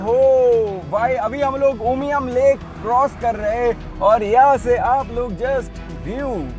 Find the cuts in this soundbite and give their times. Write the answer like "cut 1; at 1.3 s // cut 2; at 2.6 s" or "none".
none